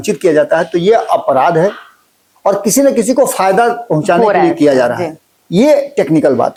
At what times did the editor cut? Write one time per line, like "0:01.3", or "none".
none